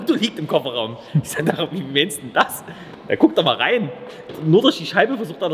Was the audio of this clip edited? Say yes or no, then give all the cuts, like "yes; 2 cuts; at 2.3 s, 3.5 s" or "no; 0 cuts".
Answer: no; 0 cuts